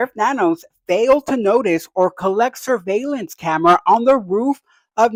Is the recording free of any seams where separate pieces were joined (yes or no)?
yes